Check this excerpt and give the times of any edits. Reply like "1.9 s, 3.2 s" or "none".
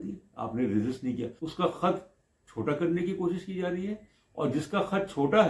1.4 s